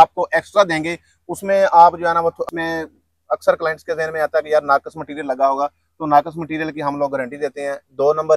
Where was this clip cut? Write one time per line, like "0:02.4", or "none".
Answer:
0:02.4